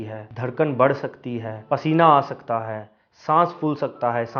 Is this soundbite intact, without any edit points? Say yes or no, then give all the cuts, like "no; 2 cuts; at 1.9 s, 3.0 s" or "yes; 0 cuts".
yes; 0 cuts